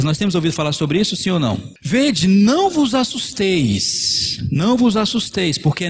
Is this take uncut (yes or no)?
no